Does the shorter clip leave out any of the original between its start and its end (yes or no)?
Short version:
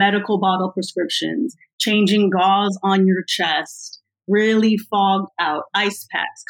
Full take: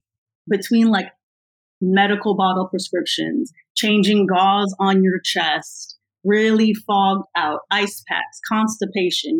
no